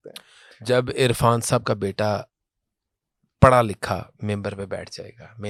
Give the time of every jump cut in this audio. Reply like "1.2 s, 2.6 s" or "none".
none